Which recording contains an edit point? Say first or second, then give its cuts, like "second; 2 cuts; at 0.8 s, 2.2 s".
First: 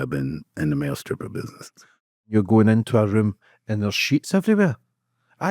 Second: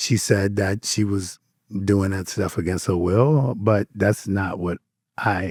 first; 1 cut; at 2.3 s